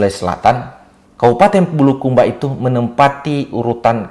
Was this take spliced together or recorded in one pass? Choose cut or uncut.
uncut